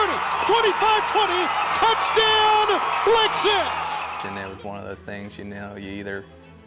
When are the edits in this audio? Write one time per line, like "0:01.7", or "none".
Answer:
0:04.2